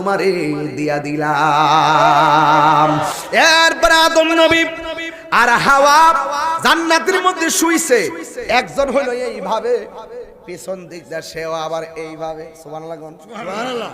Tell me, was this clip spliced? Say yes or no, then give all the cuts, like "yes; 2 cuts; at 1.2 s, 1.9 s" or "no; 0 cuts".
yes; 1 cut; at 3.1 s